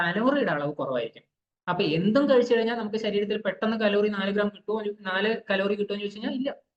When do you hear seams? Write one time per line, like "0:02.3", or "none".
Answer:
none